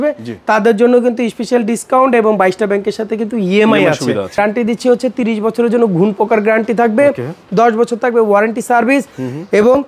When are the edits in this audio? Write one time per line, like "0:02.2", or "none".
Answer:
0:04.4